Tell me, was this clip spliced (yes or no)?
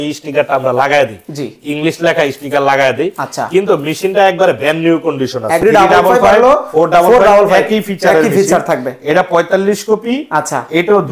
yes